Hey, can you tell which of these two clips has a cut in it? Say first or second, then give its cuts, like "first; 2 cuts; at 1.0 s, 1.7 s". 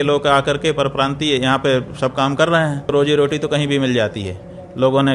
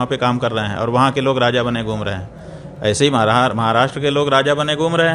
first; 1 cut; at 2.9 s